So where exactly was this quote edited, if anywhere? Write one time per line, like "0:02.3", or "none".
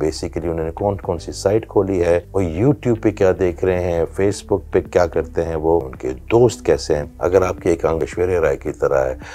0:02.3
0:06.0
0:07.1
0:08.0